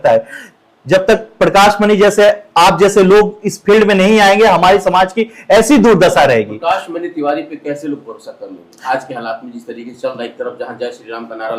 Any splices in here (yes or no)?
no